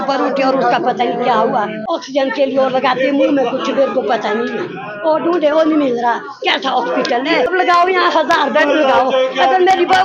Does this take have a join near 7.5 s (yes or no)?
yes